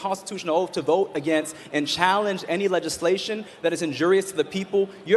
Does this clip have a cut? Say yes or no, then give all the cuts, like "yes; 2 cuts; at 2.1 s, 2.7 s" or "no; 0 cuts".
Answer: no; 0 cuts